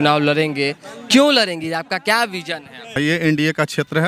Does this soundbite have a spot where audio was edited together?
yes; 1 cut; at 3.0 s

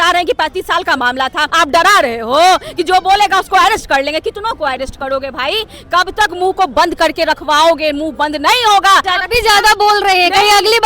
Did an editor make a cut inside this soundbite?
yes; 2 cuts; at 1.5 s, 9.1 s

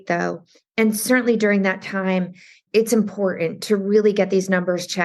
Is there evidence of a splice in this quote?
yes; 1 cut; at 2.5 s

